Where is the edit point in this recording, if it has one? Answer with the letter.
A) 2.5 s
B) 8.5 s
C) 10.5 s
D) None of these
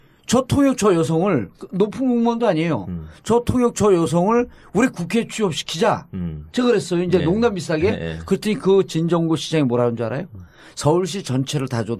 A